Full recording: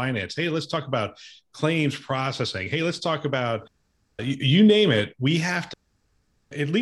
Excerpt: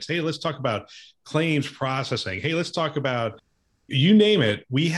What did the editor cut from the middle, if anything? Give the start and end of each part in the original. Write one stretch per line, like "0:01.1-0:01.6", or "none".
0:04.2-0:04.4